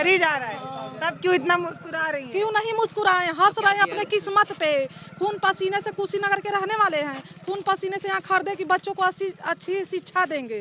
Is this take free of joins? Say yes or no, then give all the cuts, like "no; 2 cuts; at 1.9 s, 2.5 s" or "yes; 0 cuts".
yes; 0 cuts